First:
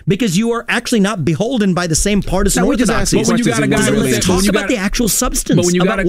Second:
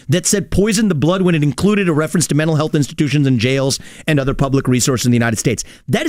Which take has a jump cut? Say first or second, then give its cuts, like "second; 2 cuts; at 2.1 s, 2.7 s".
first; 1 cut; at 3.4 s